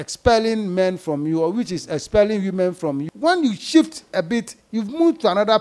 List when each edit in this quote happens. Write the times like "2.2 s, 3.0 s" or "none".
3.1 s